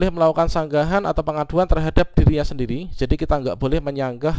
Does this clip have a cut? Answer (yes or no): no